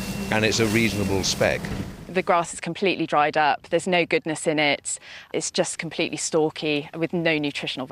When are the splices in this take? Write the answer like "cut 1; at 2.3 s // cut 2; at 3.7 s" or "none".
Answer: cut 1; at 2.0 s // cut 2; at 5.3 s